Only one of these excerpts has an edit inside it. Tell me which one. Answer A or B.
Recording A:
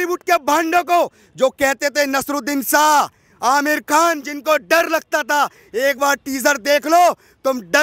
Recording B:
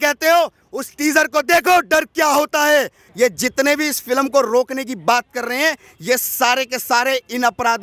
B